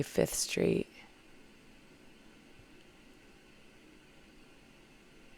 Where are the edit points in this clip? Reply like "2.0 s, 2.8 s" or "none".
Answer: none

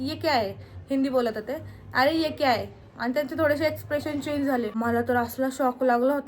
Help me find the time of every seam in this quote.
4.7 s

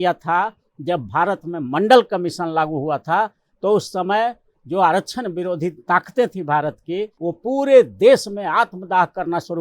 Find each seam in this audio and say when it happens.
7.1 s

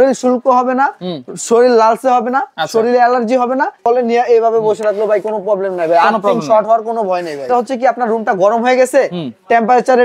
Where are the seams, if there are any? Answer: 3.8 s, 7.5 s

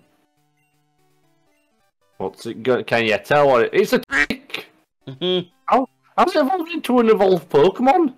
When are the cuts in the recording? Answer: 4.1 s

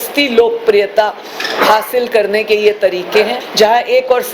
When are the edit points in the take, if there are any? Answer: 3.4 s

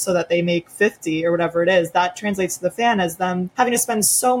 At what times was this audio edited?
3.5 s

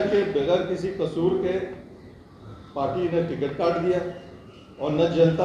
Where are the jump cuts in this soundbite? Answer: none

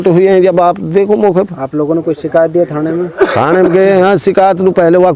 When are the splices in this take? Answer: none

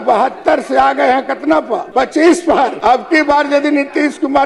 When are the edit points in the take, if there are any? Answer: 1.9 s, 2.8 s

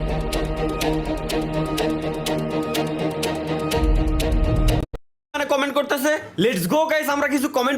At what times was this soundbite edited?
5.3 s

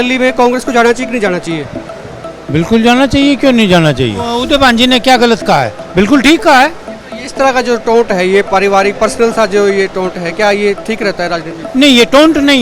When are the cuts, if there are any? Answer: 4.4 s

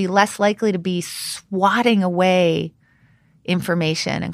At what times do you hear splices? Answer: none

